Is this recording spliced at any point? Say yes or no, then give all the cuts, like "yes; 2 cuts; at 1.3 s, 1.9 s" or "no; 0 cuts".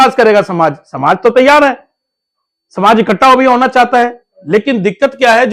no; 0 cuts